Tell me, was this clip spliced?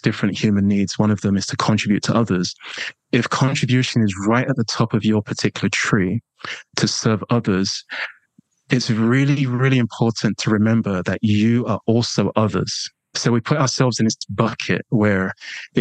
yes; 1 cut; at 13.2 s

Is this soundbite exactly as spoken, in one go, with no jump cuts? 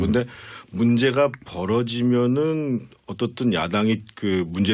no; 1 cut; at 3.3 s

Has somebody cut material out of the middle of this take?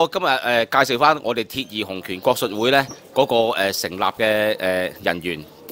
no; 0 cuts

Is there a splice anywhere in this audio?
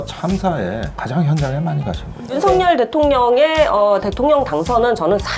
yes; 1 cut; at 2.3 s

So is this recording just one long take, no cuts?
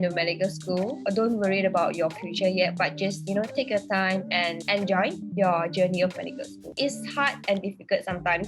no; 3 cuts; at 1.0 s, 4.6 s, 6.6 s

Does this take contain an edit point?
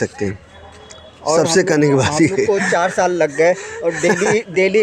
no; 0 cuts

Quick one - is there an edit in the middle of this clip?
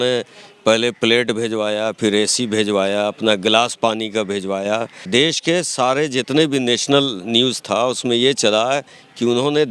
yes; 1 cut; at 5.0 s

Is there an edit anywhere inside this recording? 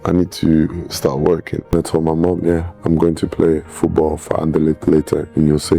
yes; 1 cut; at 1.7 s

